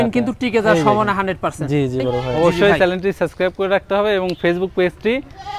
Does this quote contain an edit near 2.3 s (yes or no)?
yes